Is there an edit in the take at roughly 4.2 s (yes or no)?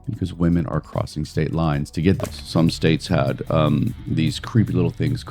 no